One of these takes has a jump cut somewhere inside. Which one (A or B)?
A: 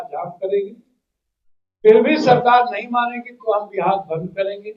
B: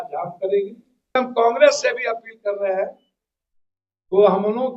B